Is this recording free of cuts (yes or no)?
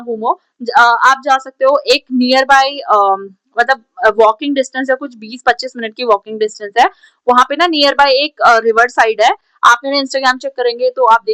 yes